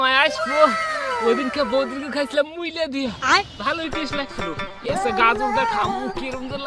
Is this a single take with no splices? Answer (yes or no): yes